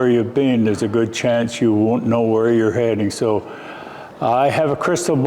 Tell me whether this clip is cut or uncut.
uncut